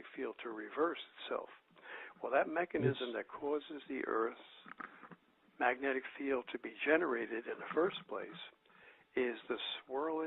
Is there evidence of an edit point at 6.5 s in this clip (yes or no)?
yes